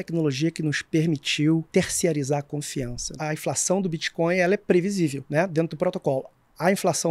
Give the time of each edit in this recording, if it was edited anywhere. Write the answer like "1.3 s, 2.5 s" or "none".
1.7 s, 3.1 s, 5.2 s

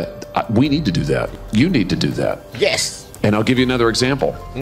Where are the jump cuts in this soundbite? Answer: 1.3 s

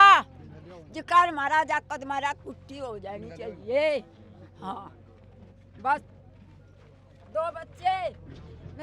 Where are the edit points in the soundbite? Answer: none

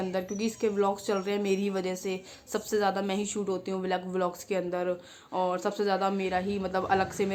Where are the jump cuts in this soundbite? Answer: none

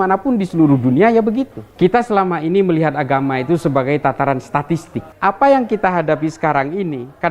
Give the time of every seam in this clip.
1.6 s, 5.0 s

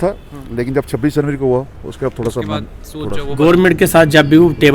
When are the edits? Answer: 3.3 s

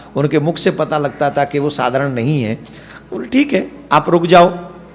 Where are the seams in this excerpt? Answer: none

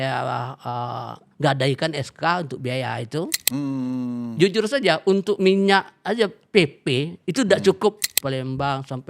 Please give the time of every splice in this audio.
3.4 s, 8.1 s

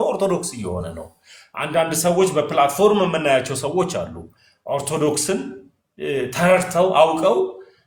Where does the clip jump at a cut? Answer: none

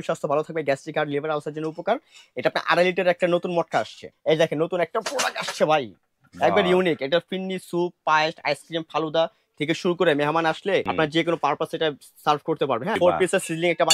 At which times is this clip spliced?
4.0 s, 10.9 s, 13.0 s

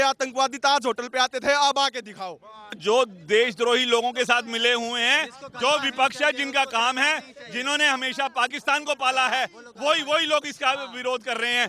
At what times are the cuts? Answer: 2.8 s

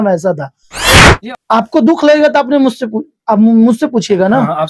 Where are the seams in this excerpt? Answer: 1.0 s

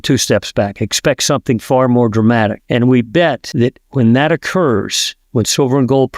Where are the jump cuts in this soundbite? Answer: 2.6 s, 3.4 s

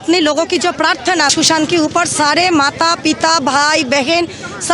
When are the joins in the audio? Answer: 1.3 s

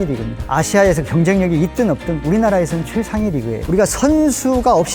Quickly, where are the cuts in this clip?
none

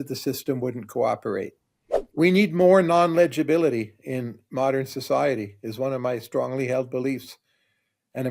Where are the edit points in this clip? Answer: 2.1 s

